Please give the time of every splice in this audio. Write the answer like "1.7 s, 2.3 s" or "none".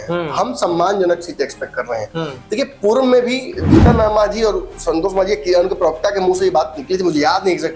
none